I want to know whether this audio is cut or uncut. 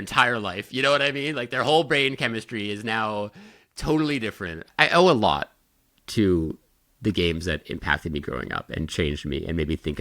cut